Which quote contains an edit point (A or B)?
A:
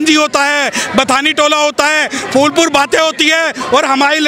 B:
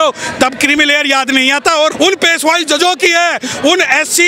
B